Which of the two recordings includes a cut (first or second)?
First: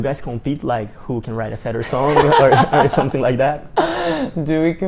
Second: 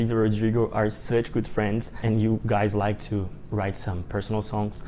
second